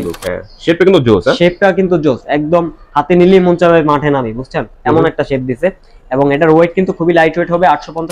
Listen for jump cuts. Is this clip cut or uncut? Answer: uncut